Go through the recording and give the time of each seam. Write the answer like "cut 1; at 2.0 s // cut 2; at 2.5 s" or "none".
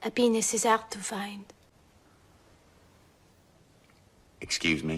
none